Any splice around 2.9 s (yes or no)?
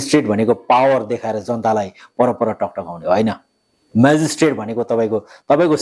no